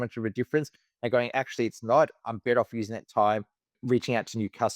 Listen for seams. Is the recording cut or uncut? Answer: cut